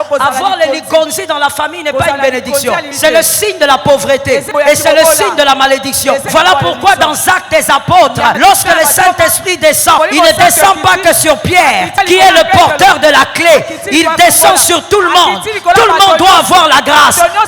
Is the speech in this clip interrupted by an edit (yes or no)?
yes